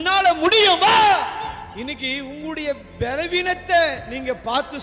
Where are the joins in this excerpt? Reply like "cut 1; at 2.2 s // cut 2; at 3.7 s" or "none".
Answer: cut 1; at 1.7 s

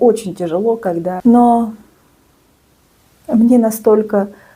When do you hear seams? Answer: cut 1; at 1.2 s

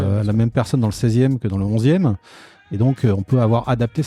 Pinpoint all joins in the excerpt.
cut 1; at 2.6 s

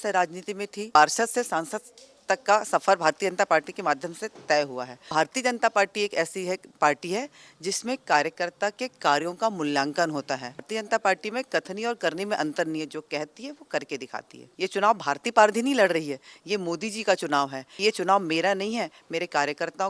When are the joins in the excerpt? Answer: cut 1; at 1.0 s // cut 2; at 5.1 s // cut 3; at 10.7 s // cut 4; at 14.4 s // cut 5; at 17.6 s

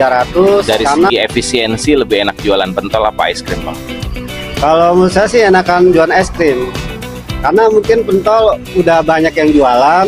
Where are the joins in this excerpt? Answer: cut 1; at 1.1 s

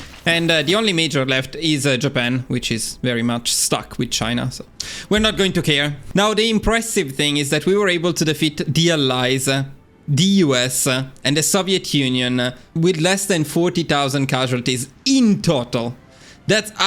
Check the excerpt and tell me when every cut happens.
cut 1; at 12.6 s

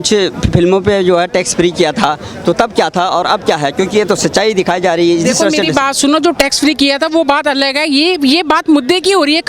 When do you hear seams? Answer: none

